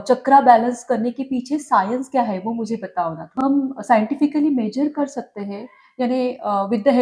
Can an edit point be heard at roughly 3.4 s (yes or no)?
yes